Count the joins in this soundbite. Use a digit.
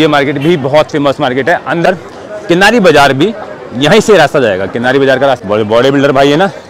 2